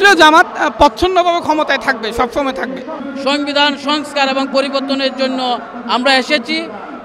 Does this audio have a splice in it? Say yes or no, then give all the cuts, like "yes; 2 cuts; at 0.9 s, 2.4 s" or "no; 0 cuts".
yes; 1 cut; at 2.9 s